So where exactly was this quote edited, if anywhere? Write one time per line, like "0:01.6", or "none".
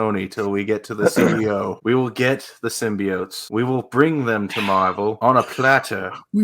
0:01.8
0:03.4
0:05.2